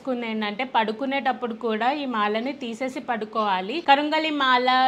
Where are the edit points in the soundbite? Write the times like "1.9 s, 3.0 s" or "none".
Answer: 3.8 s